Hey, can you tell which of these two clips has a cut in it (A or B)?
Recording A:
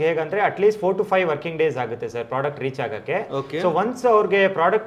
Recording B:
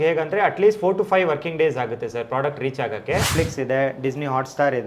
B